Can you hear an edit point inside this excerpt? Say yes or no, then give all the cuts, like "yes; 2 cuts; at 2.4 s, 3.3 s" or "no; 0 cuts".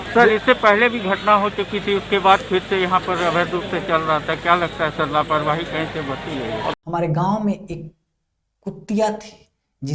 yes; 1 cut; at 6.7 s